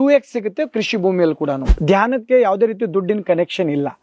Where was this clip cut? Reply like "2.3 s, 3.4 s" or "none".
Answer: 1.6 s